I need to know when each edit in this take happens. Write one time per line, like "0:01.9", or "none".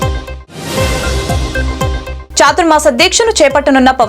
none